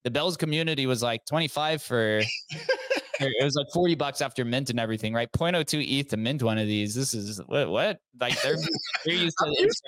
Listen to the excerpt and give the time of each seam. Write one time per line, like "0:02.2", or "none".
none